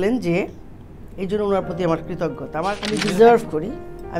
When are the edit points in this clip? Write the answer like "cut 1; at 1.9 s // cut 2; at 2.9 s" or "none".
cut 1; at 2.5 s